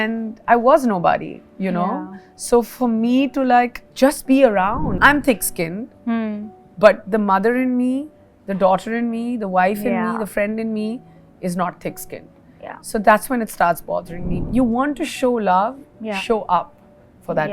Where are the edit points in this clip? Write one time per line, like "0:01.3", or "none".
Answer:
0:04.9
0:14.4